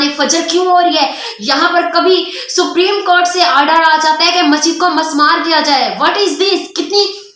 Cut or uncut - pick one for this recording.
uncut